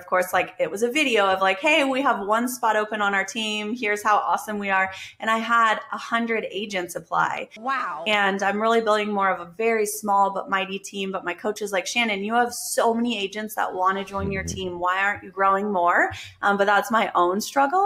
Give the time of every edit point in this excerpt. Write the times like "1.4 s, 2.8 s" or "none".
none